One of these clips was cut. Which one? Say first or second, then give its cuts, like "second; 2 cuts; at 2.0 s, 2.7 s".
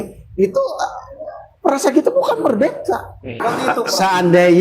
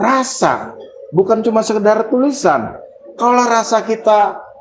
first; 1 cut; at 3.4 s